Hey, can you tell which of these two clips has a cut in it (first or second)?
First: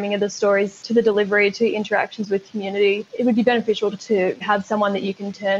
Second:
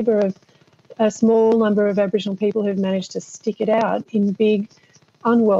first